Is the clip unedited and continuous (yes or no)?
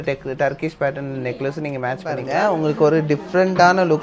yes